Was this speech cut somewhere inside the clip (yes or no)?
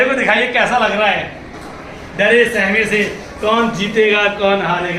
no